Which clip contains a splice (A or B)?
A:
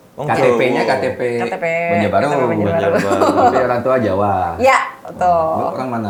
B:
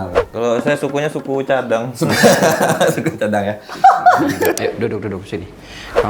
B